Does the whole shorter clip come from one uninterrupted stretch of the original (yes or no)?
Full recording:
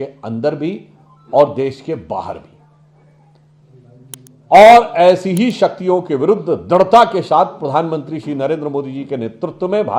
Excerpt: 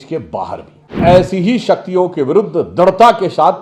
no